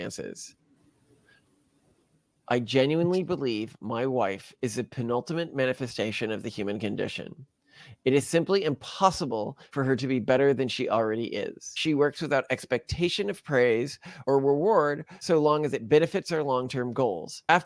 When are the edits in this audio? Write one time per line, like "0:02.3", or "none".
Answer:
0:11.7